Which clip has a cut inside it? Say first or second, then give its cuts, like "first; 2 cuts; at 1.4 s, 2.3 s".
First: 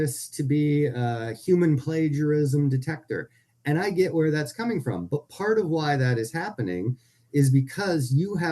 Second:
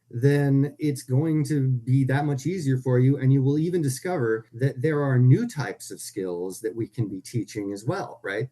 second; 1 cut; at 4.5 s